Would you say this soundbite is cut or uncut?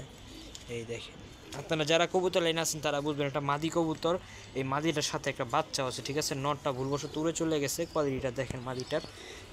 uncut